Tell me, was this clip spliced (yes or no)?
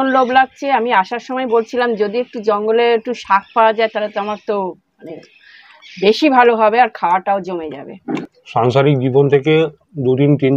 yes